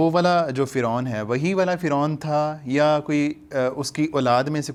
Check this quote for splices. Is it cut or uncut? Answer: uncut